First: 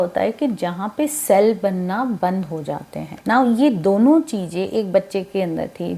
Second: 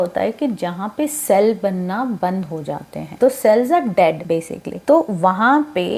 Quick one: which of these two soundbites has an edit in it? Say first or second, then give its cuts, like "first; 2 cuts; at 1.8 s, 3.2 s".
first; 1 cut; at 3.0 s